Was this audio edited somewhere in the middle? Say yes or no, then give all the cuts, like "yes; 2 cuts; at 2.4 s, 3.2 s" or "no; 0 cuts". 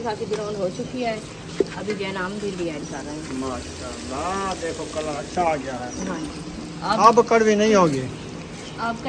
no; 0 cuts